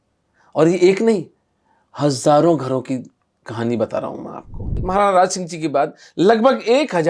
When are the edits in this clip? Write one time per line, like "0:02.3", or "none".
0:04.8

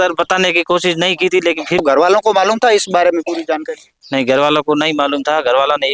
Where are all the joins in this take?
0:01.8

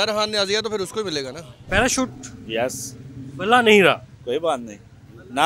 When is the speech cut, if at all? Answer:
0:01.5

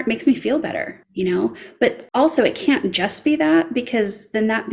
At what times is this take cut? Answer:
0:01.0
0:02.0

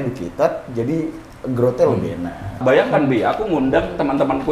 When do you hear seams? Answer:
0:02.6

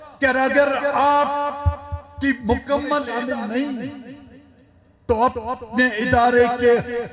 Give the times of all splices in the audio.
0:03.1

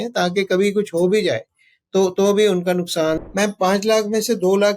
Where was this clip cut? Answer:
0:03.2

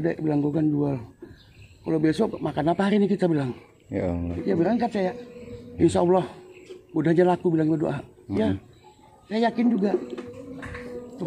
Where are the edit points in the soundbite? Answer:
0:04.3
0:05.7
0:10.2

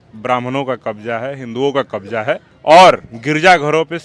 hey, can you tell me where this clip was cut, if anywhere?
none

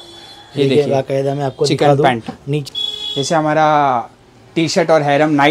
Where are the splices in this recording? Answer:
0:02.6

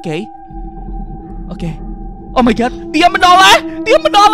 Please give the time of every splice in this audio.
none

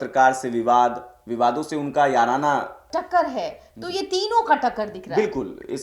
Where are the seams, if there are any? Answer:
0:02.8

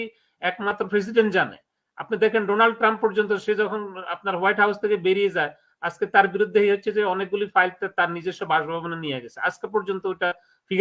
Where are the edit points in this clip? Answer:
none

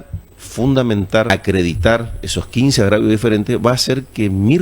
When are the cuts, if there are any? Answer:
0:01.3

